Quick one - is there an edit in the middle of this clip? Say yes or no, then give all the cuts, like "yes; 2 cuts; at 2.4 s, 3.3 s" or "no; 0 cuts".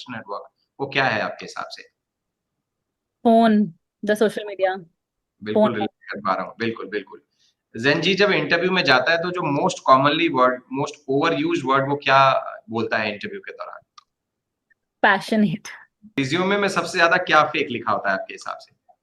yes; 1 cut; at 16.2 s